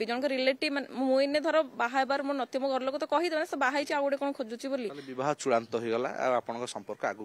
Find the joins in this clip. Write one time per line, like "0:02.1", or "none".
none